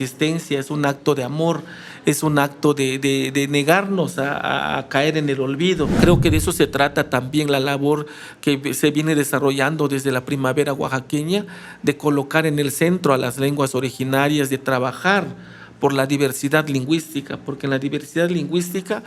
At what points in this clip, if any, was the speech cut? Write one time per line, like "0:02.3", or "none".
0:05.9